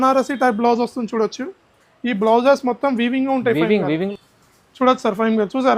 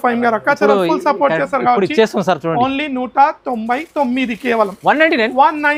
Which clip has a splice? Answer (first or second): first